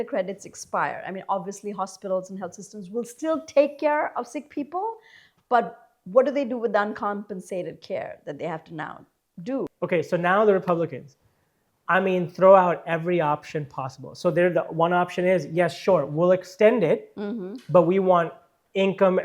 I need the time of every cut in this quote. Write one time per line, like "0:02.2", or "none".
0:09.7